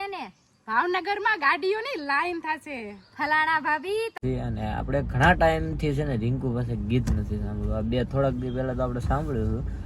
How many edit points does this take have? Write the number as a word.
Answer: one